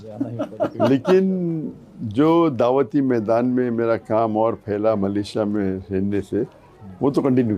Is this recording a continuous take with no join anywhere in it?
yes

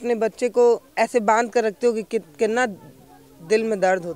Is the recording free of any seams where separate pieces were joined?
yes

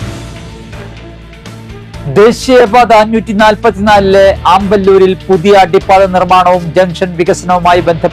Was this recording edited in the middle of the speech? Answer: yes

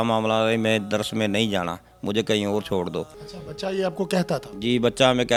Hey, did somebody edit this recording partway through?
no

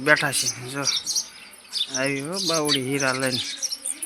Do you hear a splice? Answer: no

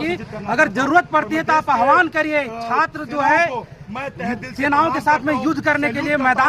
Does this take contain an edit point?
no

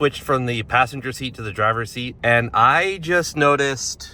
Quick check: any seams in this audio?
yes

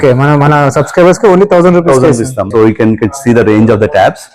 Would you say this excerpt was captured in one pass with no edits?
no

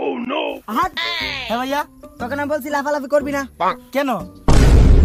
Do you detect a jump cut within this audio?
no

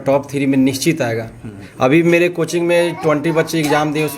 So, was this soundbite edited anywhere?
yes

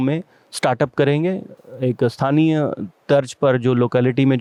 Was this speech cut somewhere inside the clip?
no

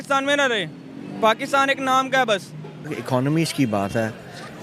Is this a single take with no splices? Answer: no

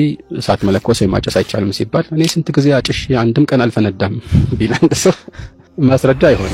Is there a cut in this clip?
no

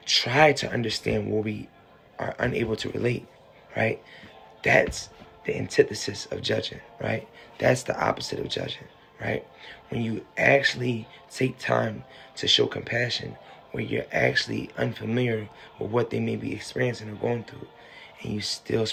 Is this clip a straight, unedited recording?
yes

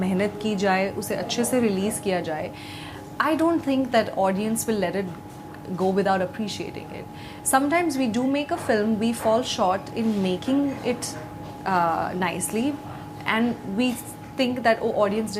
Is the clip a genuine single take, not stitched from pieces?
yes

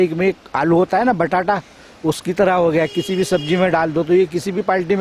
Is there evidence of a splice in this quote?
no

